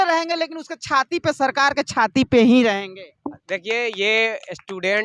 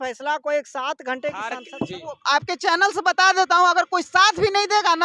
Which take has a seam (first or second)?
second